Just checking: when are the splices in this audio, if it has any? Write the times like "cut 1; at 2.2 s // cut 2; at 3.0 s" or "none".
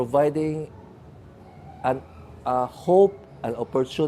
none